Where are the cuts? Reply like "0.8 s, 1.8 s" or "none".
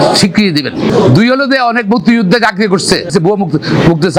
none

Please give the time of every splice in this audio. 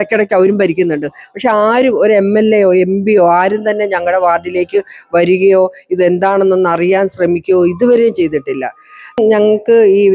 9.2 s

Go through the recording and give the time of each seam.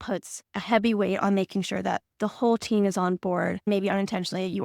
3.7 s

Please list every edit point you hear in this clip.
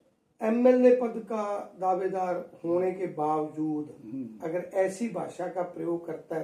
none

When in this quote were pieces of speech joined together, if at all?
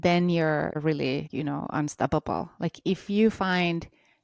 0.9 s

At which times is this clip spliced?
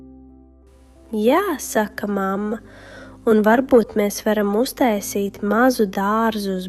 1.1 s

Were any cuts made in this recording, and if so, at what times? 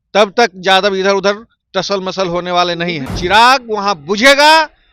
3.0 s

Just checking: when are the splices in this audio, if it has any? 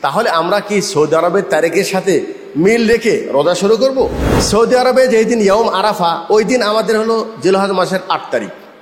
4.2 s

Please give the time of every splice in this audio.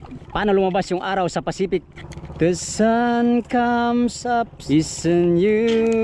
2.0 s, 4.6 s

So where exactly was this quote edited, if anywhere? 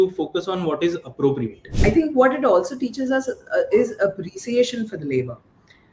1.6 s

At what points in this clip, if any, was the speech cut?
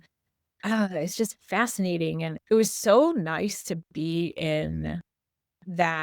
2.3 s

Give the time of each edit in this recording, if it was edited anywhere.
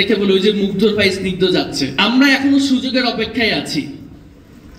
2.0 s

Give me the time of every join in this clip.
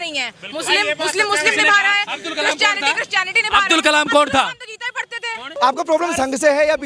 5.5 s

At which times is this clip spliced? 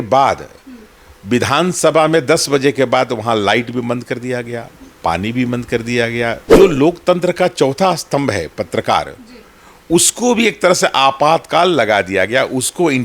6.4 s

